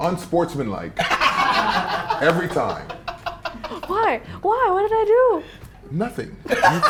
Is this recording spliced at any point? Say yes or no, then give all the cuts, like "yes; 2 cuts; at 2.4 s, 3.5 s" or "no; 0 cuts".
no; 0 cuts